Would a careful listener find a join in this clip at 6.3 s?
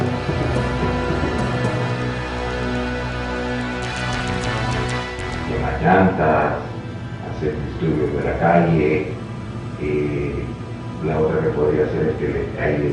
no; 1 cut; at 9.5 s

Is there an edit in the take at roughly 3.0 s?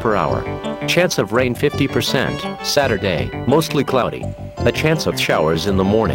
no; 1 cut; at 0.9 s

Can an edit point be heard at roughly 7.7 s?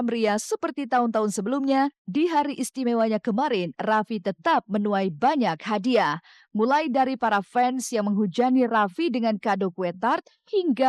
no; 0 cuts

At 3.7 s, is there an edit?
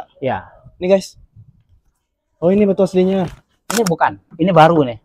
yes; 1 cut; at 3.7 s

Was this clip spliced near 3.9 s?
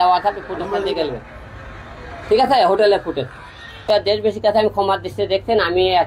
yes; 1 cut; at 3.9 s

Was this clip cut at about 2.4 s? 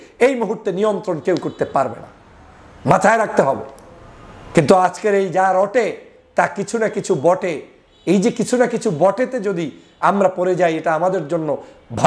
no; 0 cuts

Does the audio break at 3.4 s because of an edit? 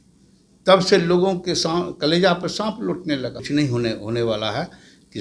yes; 1 cut; at 3.4 s

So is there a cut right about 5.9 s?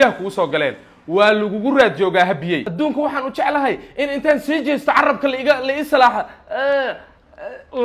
no; 1 cut; at 2.6 s

